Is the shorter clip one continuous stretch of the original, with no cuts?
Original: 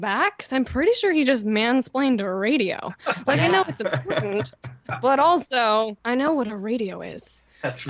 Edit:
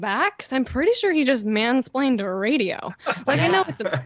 yes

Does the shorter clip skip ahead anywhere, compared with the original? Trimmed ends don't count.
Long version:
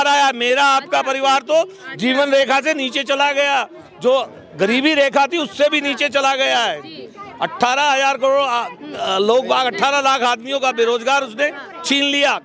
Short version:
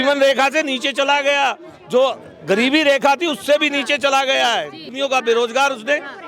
yes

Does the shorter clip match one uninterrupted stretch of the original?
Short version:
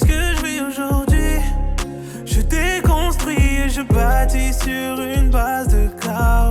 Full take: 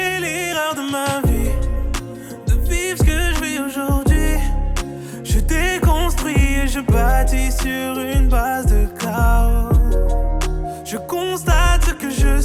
yes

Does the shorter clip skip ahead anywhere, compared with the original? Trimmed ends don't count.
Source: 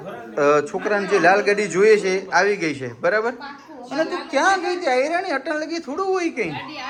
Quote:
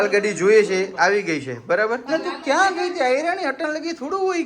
yes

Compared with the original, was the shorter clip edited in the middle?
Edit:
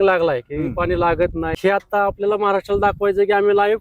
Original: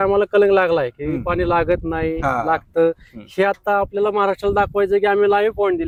yes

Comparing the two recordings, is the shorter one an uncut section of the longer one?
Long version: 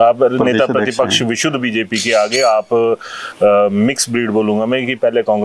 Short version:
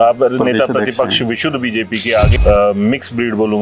no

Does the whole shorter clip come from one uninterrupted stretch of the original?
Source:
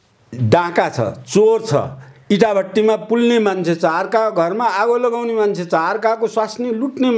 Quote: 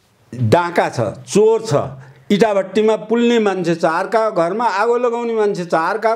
yes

